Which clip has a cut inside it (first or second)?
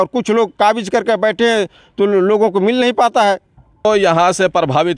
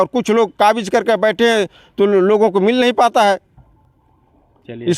first